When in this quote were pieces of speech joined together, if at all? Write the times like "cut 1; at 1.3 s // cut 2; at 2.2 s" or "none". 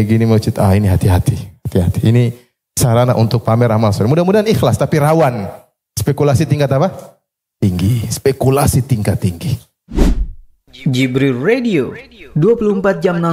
cut 1; at 9.9 s